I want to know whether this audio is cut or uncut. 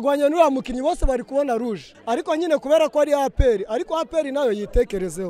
cut